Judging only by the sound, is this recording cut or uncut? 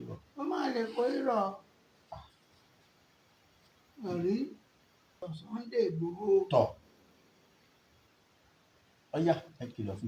cut